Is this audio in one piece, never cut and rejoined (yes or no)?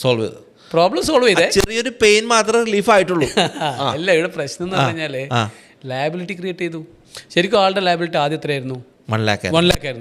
yes